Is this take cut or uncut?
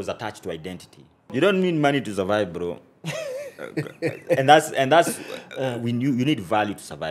cut